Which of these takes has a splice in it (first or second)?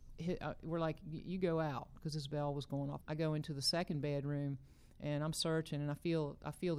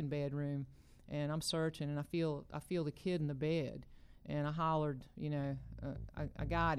first